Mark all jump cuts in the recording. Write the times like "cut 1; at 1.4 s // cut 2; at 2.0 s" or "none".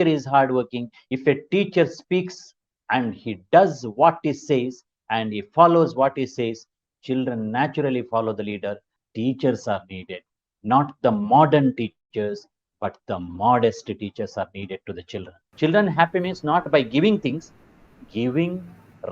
cut 1; at 8.9 s // cut 2; at 15.5 s